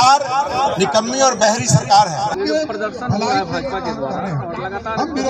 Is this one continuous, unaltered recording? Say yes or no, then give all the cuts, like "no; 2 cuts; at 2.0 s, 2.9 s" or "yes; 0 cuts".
yes; 0 cuts